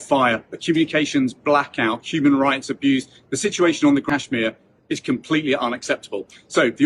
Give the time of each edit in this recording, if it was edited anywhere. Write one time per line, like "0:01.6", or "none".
0:04.0